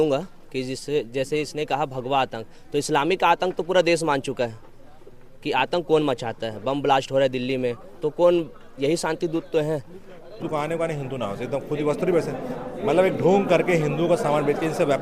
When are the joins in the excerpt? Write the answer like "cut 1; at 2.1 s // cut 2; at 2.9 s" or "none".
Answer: cut 1; at 10.4 s